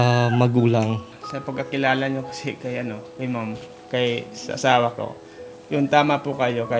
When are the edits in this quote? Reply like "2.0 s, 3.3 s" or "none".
1.1 s